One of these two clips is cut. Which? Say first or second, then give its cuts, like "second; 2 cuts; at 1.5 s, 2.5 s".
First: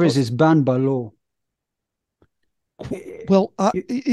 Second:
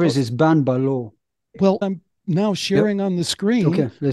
second; 1 cut; at 1.8 s